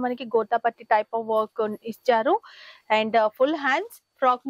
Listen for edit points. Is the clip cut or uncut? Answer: uncut